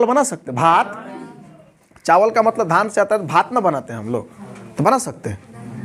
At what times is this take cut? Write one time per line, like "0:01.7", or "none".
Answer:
none